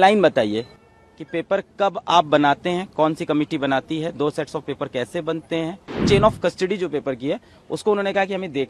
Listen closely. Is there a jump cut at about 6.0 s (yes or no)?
yes